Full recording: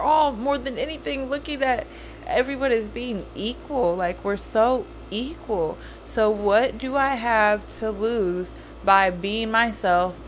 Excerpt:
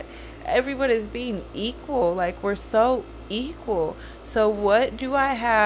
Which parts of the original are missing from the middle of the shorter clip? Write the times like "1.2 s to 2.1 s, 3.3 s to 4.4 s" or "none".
none

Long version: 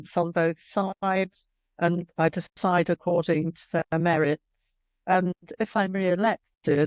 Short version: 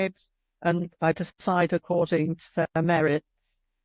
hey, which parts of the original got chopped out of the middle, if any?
none

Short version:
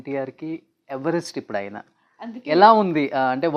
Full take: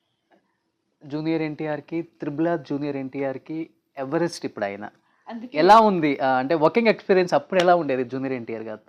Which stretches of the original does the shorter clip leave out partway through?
none

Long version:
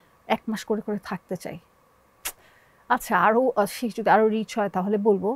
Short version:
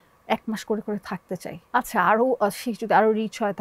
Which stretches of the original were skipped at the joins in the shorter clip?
1.5 s to 2.7 s

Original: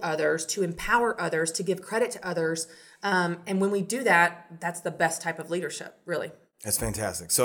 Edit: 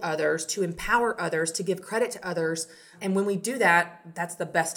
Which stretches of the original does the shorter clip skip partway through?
2.9 s to 3.4 s

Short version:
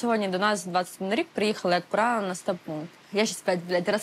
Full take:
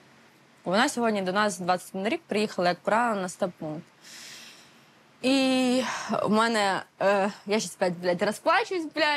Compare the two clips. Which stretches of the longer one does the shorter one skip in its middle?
4.0 s to 7.4 s

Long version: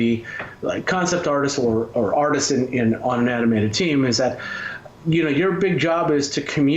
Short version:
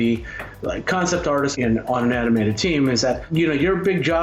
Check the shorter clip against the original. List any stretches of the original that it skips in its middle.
1.5 s to 2.7 s, 4.4 s to 5.0 s

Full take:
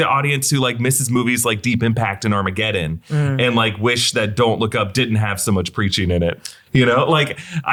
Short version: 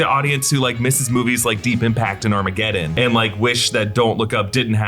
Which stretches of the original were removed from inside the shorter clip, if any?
2.9 s to 3.3 s

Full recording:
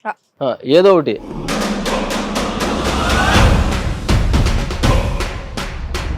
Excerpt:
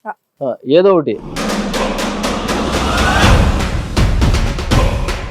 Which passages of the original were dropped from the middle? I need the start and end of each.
1.3 s to 1.4 s

